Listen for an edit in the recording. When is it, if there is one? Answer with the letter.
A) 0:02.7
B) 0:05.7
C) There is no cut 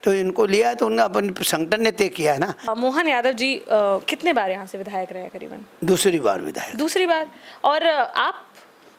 A